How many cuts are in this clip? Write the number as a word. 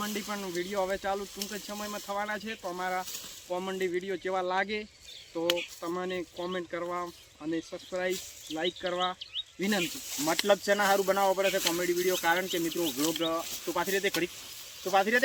zero